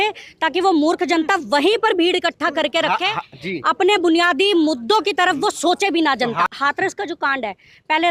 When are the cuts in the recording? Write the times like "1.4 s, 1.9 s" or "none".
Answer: 6.5 s